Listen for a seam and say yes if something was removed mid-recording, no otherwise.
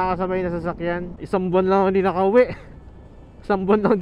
yes